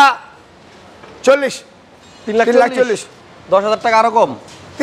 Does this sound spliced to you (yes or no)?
no